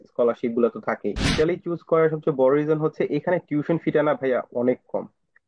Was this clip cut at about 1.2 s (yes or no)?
yes